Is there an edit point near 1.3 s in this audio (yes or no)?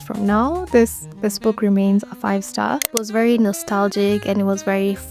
no